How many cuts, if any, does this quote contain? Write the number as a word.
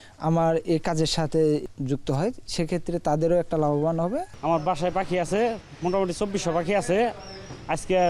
two